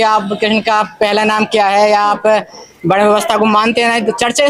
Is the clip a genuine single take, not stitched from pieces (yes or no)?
yes